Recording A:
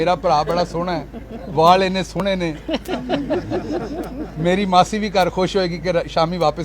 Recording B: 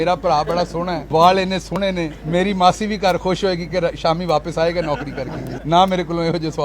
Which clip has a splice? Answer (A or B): B